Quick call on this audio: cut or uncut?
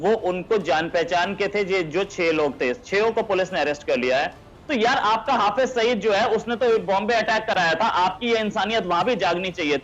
cut